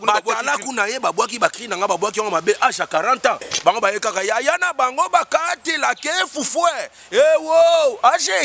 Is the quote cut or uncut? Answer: uncut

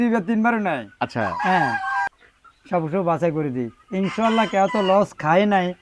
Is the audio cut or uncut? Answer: cut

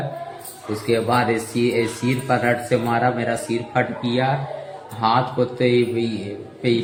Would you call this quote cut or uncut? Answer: uncut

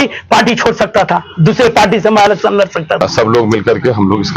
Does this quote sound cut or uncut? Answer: cut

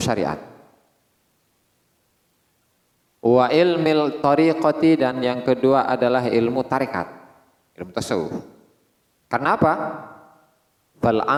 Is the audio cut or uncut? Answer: uncut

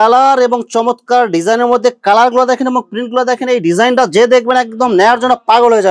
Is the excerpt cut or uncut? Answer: uncut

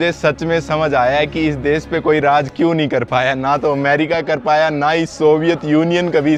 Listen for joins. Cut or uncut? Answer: uncut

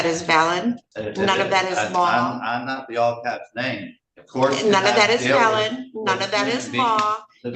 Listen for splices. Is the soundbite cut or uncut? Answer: cut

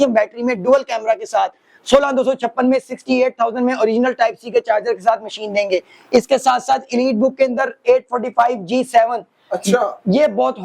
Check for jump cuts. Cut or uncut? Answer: uncut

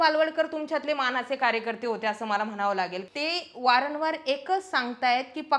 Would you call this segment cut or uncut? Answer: cut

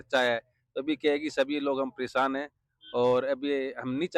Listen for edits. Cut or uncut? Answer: uncut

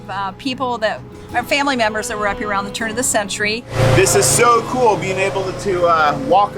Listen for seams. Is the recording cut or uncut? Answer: cut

